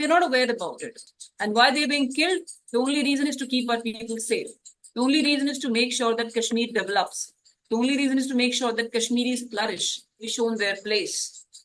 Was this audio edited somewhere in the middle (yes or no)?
yes